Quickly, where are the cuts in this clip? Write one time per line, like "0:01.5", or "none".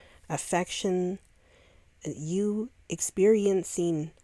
none